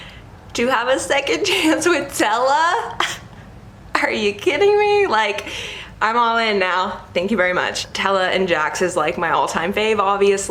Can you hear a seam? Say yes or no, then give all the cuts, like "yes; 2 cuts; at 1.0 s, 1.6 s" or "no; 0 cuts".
no; 0 cuts